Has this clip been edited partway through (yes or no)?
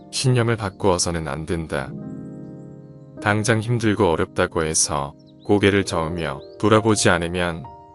no